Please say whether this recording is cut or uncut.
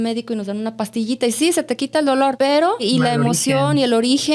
cut